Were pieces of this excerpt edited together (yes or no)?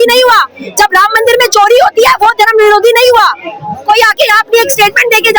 no